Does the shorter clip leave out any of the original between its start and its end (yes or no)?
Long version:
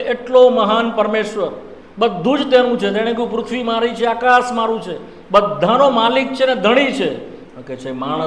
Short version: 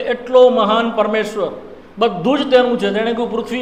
no